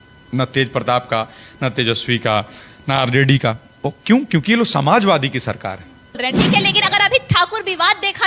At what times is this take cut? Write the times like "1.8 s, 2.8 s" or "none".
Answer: 6.2 s